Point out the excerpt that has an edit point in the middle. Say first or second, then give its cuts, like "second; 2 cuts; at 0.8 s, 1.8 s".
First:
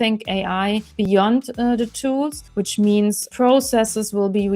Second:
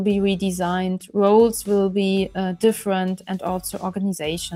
first; 3 cuts; at 0.9 s, 2.4 s, 3.3 s